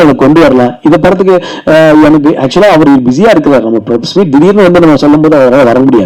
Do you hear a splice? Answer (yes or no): no